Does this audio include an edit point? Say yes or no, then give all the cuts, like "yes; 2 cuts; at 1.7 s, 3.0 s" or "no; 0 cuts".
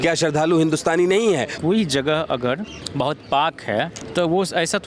yes; 3 cuts; at 1.5 s, 2.8 s, 4.0 s